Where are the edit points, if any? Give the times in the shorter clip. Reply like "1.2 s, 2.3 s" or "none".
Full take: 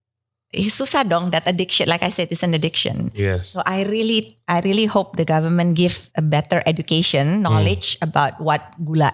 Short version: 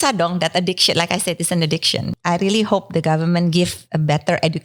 2.1 s